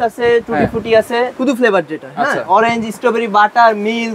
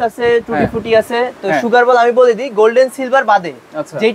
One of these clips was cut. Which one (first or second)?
first